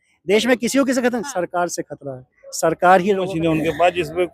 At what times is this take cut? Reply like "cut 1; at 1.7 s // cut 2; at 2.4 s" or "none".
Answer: cut 1; at 3.3 s